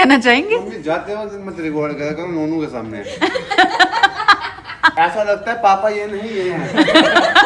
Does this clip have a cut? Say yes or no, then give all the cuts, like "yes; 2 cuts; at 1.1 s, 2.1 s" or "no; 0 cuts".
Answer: yes; 1 cut; at 4.9 s